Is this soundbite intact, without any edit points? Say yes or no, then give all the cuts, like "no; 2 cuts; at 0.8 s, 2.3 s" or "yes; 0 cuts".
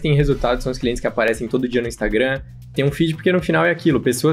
yes; 0 cuts